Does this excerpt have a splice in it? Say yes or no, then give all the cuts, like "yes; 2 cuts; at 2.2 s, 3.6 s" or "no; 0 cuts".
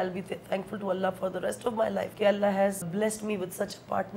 yes; 2 cuts; at 2.1 s, 2.9 s